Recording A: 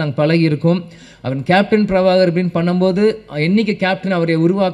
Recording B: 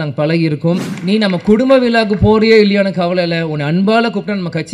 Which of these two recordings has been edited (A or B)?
B